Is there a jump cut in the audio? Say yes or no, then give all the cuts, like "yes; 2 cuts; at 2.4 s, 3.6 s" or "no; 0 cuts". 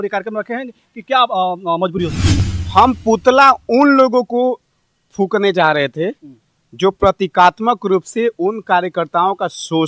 yes; 1 cut; at 2.3 s